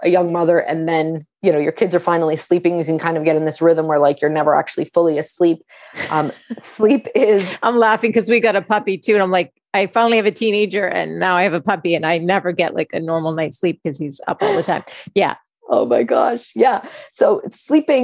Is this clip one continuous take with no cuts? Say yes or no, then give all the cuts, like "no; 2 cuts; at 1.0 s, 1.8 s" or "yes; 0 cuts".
yes; 0 cuts